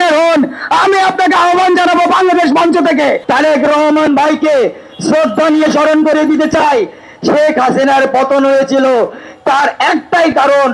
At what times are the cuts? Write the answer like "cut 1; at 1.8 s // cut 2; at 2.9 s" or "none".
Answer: cut 1; at 3.2 s

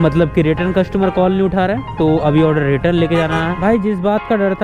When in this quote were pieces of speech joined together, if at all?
cut 1; at 3.6 s

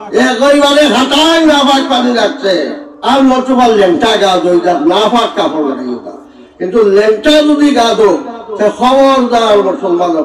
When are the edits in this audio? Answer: cut 1; at 2.9 s

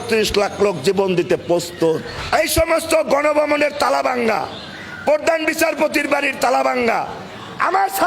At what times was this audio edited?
cut 1; at 2.1 s

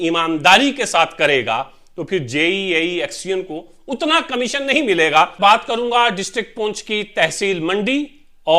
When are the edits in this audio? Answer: cut 1; at 5.3 s

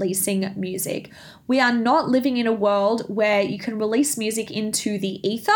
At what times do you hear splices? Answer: none

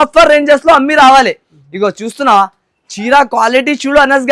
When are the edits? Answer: none

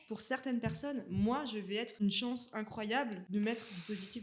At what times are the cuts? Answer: cut 1; at 2.0 s // cut 2; at 3.2 s

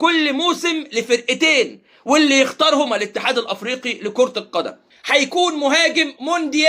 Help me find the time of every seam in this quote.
cut 1; at 4.8 s

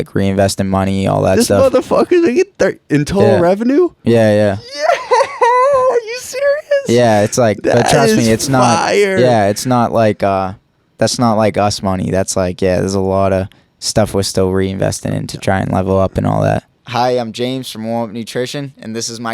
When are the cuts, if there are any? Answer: cut 1; at 16.7 s

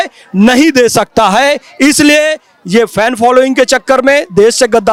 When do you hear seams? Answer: none

